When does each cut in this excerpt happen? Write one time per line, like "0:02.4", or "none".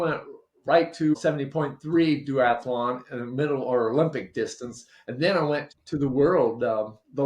0:01.1
0:05.7

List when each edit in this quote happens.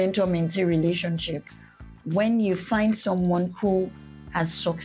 none

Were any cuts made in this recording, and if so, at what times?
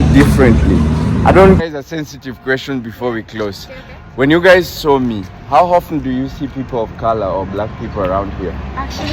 0:01.6

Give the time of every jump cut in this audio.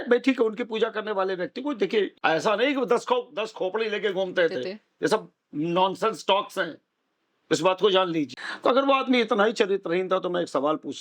0:02.1
0:08.4

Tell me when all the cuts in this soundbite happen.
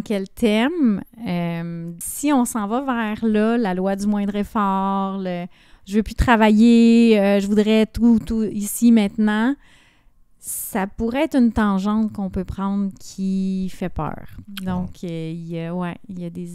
0:01.9

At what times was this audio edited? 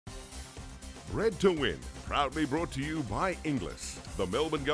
0:01.1

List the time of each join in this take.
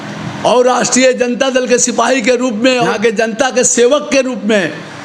0:02.9

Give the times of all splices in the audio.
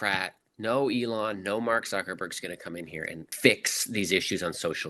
0:03.3

